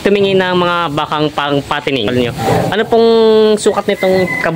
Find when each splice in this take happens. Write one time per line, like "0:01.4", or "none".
0:02.1